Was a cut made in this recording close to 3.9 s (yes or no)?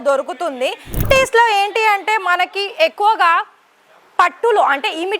no